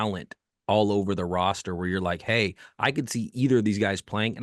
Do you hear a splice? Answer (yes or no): no